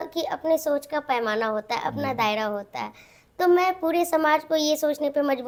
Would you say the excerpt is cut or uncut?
uncut